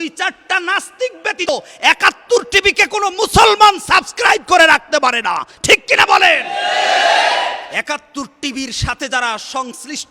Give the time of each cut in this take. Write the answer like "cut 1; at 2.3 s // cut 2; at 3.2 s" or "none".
cut 1; at 1.5 s // cut 2; at 7.7 s